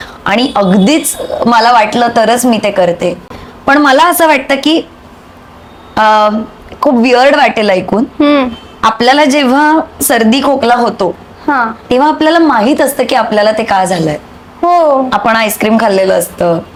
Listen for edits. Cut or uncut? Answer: uncut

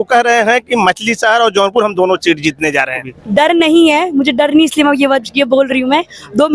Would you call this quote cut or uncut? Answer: cut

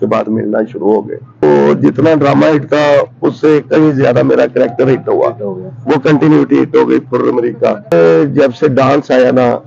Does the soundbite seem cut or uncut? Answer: cut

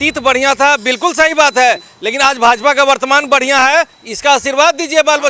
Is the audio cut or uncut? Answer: uncut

